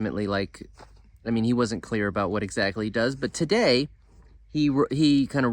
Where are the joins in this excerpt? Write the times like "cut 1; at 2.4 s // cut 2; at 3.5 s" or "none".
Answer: none